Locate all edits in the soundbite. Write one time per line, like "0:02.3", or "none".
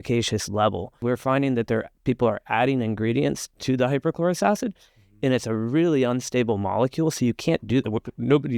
0:01.0